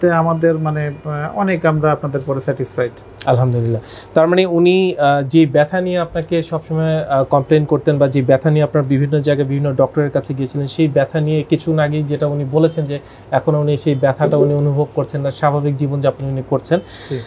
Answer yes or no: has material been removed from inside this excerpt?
no